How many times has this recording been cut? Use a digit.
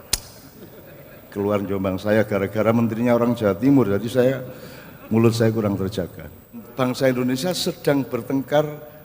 1